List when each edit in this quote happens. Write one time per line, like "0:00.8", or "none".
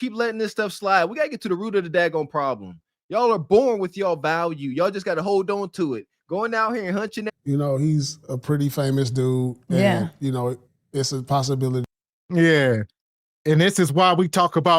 0:07.3